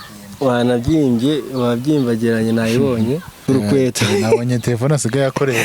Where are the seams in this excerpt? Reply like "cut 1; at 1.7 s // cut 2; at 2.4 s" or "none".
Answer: cut 1; at 3.3 s